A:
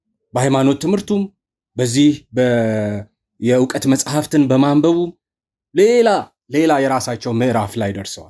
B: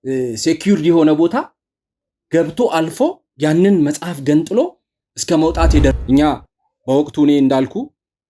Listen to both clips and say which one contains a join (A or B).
B